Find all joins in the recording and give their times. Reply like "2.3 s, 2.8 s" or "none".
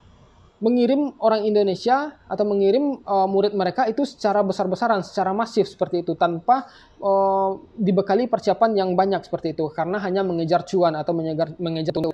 none